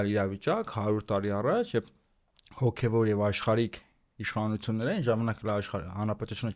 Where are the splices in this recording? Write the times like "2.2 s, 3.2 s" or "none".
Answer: none